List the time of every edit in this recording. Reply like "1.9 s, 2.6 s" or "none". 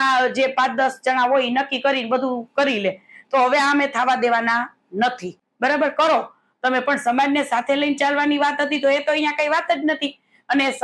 none

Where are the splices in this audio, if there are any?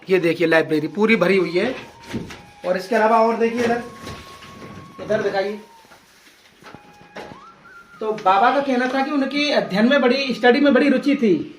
none

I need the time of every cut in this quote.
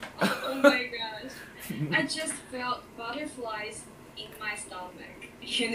none

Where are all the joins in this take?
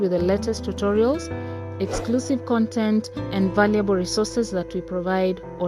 none

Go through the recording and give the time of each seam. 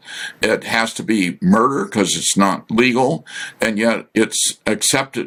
none

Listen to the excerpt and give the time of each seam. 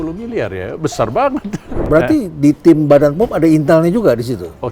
1.8 s

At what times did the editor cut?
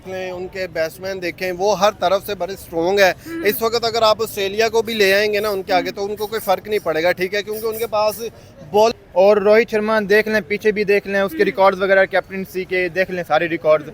8.9 s

